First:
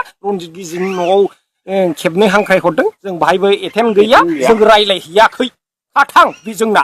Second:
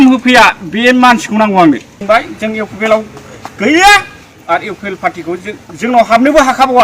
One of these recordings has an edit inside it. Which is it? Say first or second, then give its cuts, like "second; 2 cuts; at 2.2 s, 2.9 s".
second; 1 cut; at 1.9 s